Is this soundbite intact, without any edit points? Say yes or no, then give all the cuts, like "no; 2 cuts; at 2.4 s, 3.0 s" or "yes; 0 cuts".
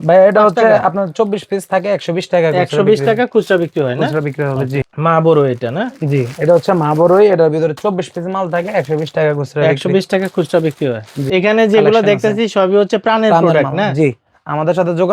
yes; 0 cuts